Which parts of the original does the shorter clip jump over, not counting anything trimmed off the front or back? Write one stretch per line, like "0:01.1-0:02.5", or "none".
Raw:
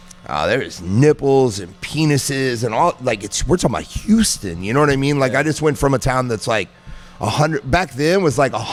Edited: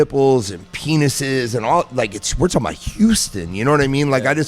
none